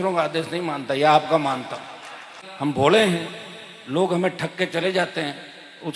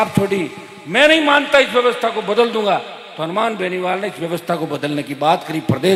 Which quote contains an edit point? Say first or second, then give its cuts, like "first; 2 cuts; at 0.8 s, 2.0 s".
first; 1 cut; at 2.4 s